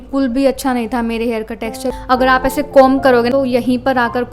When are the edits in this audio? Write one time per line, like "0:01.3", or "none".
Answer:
0:02.0
0:03.3